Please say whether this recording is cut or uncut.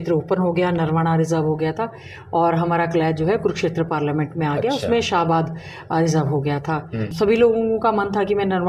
cut